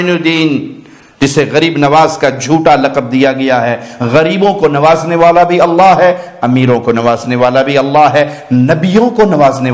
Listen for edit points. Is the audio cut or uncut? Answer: uncut